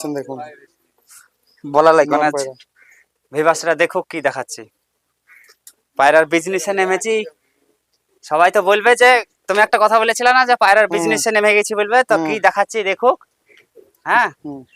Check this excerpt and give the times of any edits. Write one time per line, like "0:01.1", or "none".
none